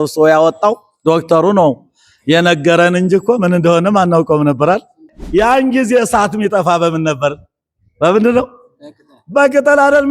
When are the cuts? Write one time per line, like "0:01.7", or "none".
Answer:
0:05.1